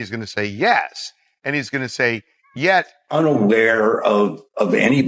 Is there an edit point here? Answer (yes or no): yes